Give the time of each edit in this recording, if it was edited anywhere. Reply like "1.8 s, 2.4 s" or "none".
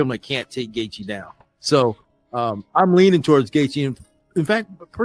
3.1 s